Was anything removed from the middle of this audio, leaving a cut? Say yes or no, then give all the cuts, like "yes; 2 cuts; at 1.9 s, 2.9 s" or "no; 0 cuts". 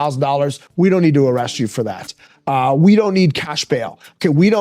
no; 0 cuts